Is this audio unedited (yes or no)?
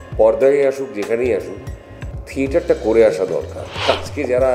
no